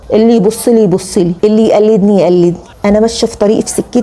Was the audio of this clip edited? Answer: no; 0 cuts

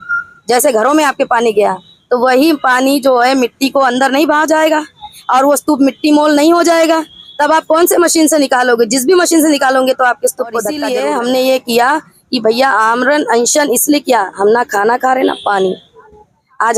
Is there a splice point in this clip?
yes; 1 cut; at 10.8 s

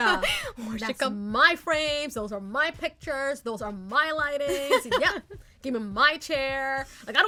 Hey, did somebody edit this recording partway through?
no; 0 cuts

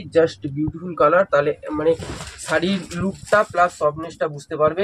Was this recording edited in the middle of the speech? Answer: no; 0 cuts

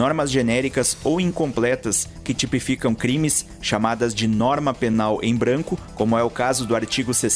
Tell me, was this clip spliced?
no; 0 cuts

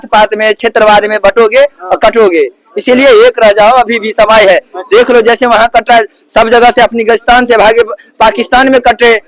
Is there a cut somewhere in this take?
no; 0 cuts

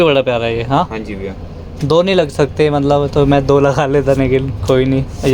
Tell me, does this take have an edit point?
no; 0 cuts

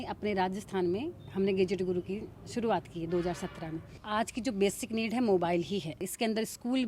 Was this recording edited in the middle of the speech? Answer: yes; 2 cuts; at 3.9 s, 6.1 s

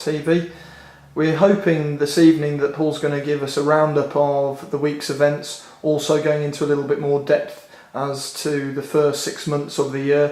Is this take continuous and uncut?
yes; 0 cuts

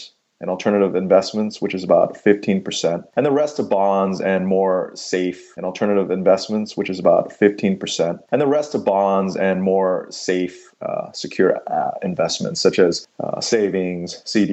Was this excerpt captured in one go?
no; 1 cut; at 5.5 s

